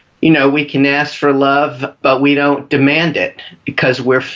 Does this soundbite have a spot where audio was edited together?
no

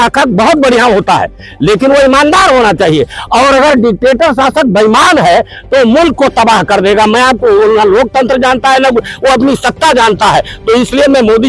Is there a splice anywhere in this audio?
no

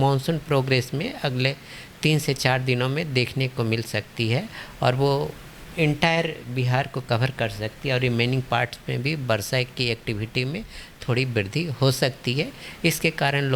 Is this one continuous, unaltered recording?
yes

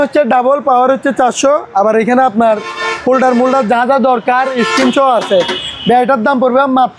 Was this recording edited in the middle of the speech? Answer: no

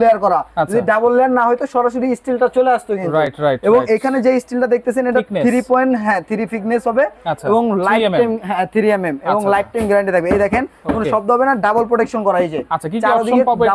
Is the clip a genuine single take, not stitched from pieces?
yes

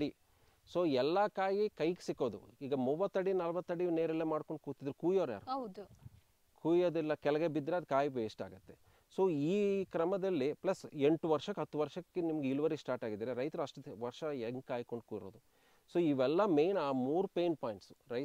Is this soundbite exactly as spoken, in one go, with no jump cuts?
yes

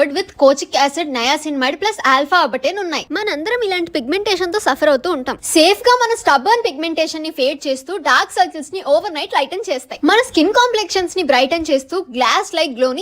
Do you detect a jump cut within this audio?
yes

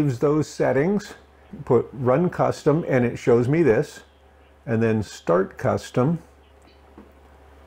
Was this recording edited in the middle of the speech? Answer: yes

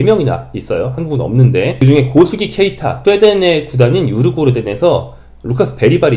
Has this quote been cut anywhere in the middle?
yes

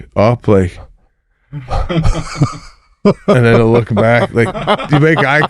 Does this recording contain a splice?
no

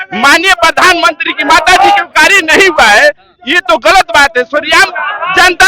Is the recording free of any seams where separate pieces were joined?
yes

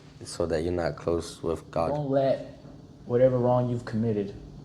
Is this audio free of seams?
no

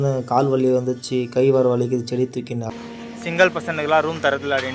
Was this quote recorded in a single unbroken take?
no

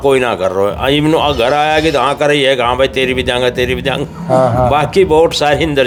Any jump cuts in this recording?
no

